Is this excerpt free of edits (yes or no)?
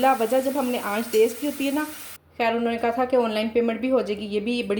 no